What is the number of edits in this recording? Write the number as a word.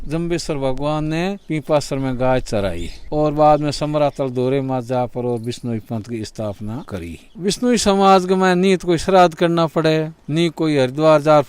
two